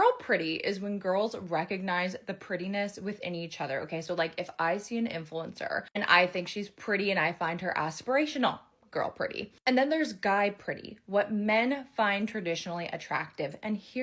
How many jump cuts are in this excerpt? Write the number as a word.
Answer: zero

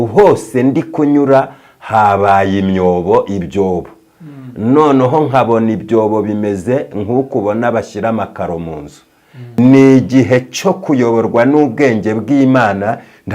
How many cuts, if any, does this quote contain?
one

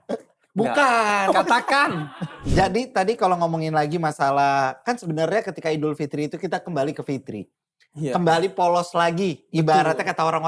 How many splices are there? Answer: one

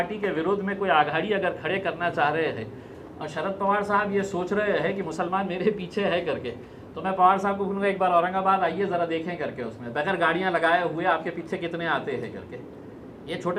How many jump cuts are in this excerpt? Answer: zero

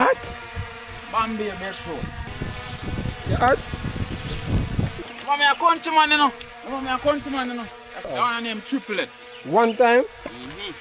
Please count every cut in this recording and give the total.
three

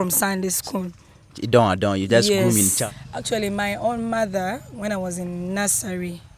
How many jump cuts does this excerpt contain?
one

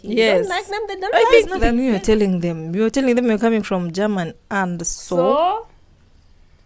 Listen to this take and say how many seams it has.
one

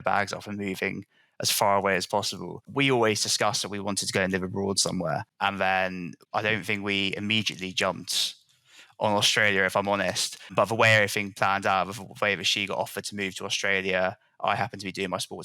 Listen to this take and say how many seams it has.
one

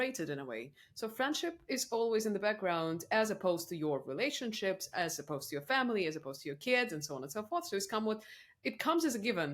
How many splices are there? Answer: zero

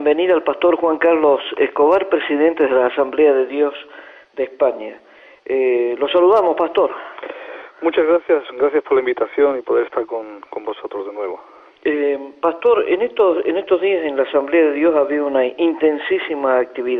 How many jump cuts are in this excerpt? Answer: zero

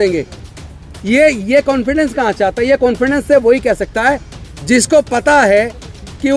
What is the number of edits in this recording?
zero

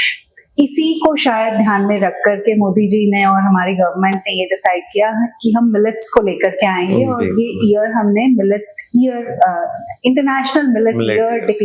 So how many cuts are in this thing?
zero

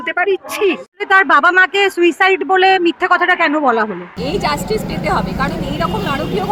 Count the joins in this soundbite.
two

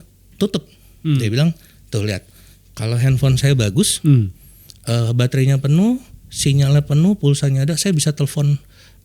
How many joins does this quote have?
one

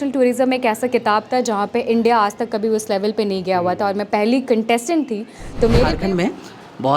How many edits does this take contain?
one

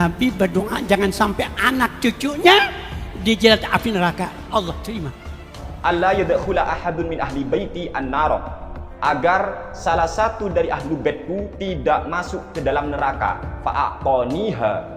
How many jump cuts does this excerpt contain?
one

